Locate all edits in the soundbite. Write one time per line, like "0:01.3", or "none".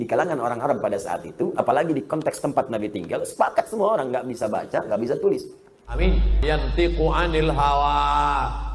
0:06.4